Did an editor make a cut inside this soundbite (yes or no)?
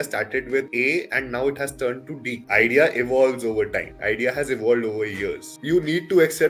yes